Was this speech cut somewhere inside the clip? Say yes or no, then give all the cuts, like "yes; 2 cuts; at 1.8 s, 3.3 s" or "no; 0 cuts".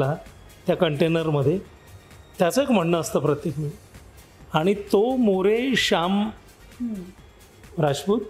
no; 0 cuts